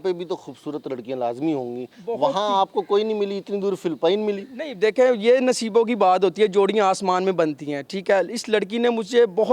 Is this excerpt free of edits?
yes; 0 cuts

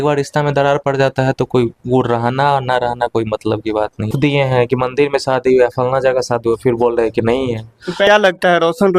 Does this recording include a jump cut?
yes; 2 cuts; at 4.1 s, 8.1 s

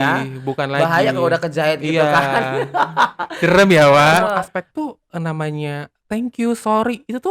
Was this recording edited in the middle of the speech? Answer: yes; 1 cut; at 4.5 s

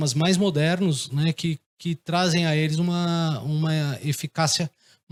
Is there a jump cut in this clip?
no; 0 cuts

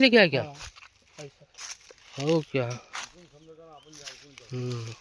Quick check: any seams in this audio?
no; 0 cuts

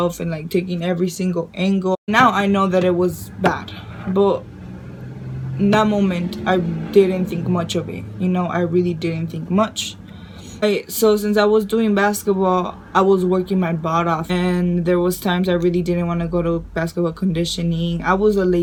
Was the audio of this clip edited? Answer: no; 0 cuts

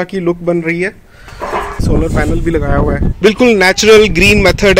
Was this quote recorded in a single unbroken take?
no; 2 cuts; at 1.8 s, 3.1 s

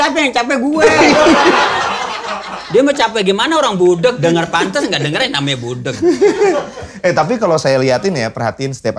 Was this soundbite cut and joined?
no; 0 cuts

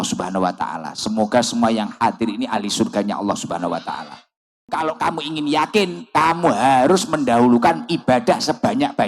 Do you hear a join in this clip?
yes; 1 cut; at 4.7 s

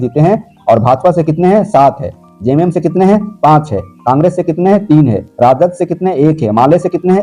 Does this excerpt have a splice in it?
no; 0 cuts

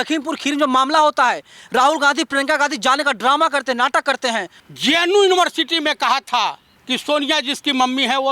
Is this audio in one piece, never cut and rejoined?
no; 2 cuts; at 4.5 s, 6.7 s

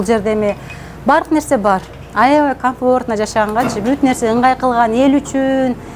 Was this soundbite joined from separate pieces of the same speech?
no; 0 cuts

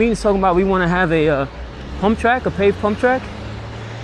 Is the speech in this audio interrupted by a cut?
no; 0 cuts

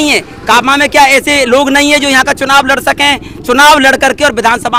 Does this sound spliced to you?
no; 0 cuts

